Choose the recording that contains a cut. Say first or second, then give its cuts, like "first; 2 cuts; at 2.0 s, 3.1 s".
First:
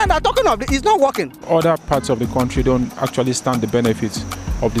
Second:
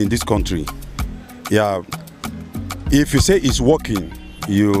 first; 1 cut; at 1.3 s